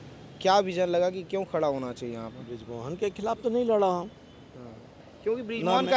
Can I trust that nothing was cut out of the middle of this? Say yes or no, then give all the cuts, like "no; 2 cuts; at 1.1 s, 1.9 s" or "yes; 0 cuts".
yes; 0 cuts